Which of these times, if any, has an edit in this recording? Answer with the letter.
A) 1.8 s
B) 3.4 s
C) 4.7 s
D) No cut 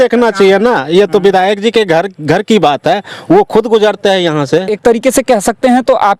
C